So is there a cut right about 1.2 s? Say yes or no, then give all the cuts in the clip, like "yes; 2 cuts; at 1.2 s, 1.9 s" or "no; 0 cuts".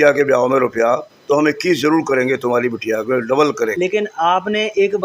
no; 1 cut; at 3.7 s